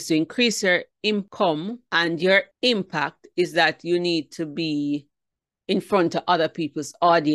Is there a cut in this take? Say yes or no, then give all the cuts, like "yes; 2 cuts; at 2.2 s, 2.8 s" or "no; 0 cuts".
yes; 2 cuts; at 1.6 s, 2.5 s